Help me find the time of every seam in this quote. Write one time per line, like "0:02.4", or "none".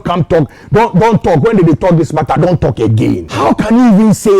0:03.3